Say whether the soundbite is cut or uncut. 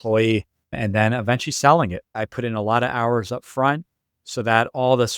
cut